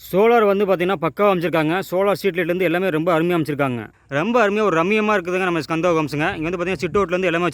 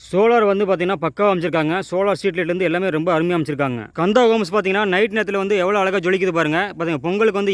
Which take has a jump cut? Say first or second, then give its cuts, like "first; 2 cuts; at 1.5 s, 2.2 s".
first; 1 cut; at 3.8 s